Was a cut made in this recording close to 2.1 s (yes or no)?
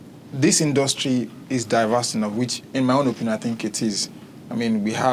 no